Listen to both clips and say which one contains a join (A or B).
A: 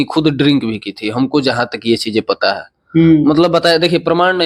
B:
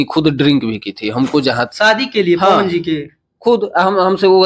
B